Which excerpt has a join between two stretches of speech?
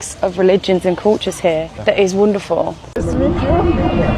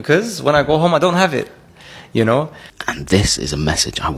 second; 1 cut; at 2.6 s

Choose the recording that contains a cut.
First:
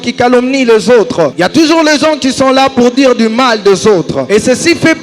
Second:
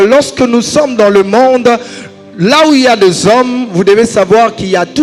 first; 2 cuts; at 1.3 s, 4.2 s

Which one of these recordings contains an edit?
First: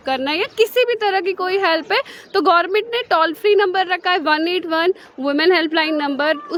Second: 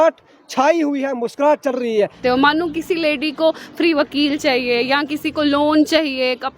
second; 1 cut; at 2.2 s

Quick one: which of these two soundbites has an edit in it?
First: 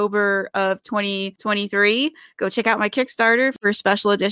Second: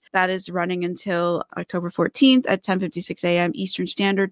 first; 1 cut; at 1.3 s

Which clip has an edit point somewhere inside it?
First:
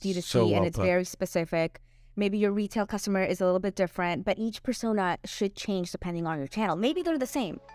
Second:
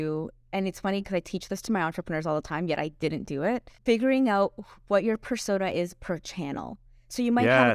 second; 1 cut; at 3.7 s

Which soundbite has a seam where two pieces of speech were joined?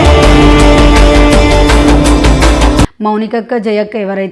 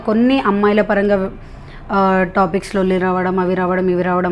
first; 1 cut; at 3.0 s

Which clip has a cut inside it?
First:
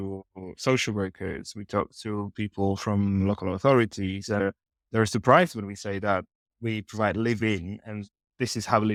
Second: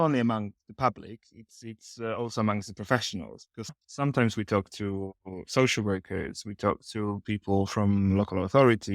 second; 1 cut; at 3.7 s

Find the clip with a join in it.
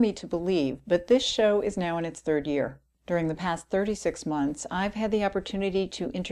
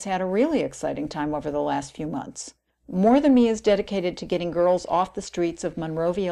second; 1 cut; at 5.0 s

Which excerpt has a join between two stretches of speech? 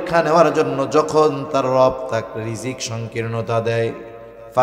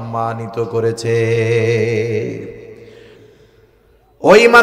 second; 1 cut; at 3.2 s

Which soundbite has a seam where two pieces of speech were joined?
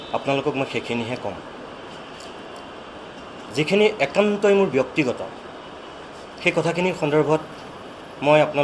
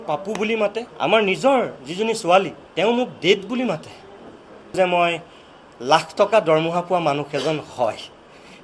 second; 3 cuts; at 0.9 s, 2.6 s, 4.7 s

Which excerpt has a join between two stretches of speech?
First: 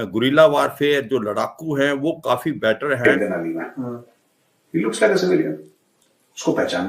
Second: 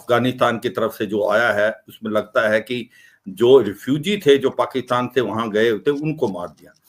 first; 1 cut; at 3.0 s

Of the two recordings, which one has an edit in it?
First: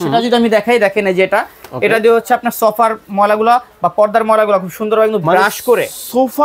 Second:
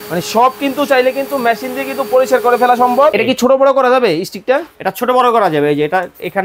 second; 1 cut; at 3.1 s

